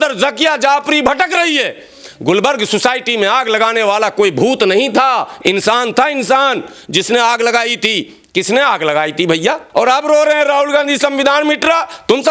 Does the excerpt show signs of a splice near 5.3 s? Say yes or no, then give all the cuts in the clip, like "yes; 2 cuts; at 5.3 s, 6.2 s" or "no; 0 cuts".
no; 1 cut; at 9.6 s